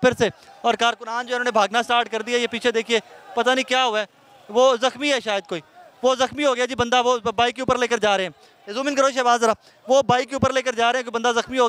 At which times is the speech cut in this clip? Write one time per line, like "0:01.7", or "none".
none